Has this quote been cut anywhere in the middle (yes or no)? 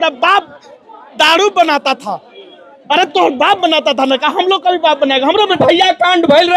yes